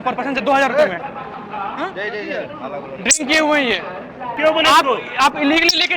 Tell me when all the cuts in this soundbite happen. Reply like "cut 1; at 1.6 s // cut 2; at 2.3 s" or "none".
cut 1; at 1.3 s // cut 2; at 4.3 s